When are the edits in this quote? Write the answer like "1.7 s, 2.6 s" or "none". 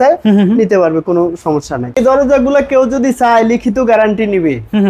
2.0 s